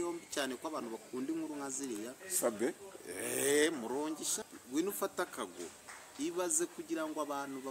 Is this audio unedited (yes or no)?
no